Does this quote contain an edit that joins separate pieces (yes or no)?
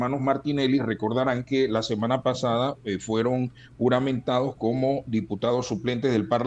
no